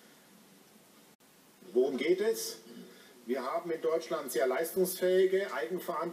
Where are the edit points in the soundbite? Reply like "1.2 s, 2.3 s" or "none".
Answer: none